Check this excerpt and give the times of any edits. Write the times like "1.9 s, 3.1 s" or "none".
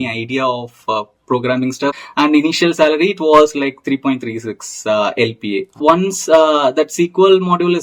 2.0 s, 5.7 s